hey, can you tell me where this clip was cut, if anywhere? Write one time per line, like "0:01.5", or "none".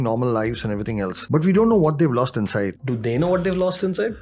0:01.1
0:02.8